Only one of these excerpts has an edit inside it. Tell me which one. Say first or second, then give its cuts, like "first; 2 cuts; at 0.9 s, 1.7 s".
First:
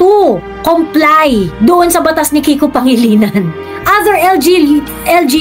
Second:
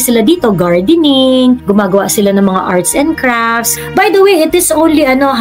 second; 2 cuts; at 1.6 s, 3.7 s